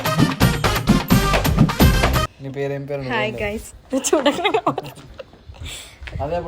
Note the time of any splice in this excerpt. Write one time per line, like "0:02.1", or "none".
0:02.4

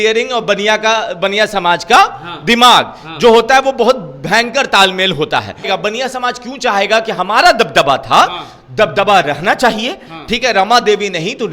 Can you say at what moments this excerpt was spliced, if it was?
0:05.7

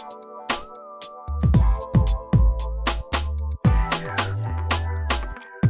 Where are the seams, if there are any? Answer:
none

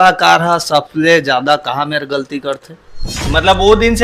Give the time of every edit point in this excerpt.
0:03.1

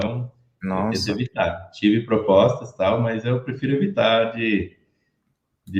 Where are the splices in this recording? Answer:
none

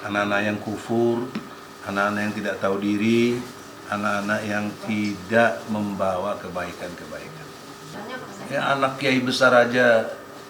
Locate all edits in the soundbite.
0:08.0

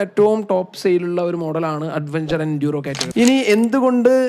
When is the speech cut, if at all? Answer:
0:03.1

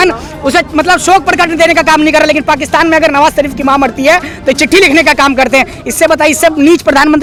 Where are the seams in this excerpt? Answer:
none

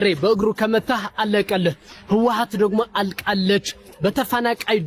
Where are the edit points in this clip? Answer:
none

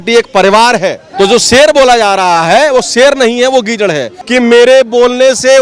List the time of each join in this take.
0:01.0
0:04.1

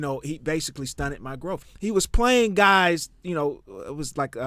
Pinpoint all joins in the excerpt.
0:01.6

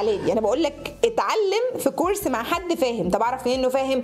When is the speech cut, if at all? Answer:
none

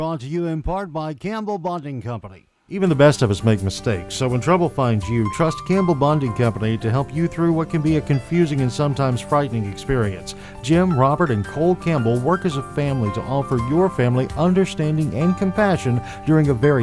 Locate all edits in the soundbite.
0:02.8

